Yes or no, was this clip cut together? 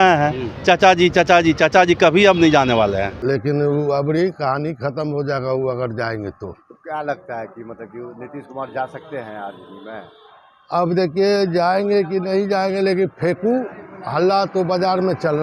no